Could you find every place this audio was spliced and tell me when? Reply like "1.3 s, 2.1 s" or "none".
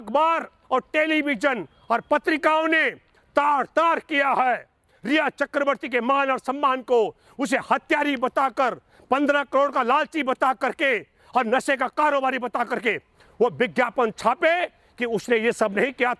none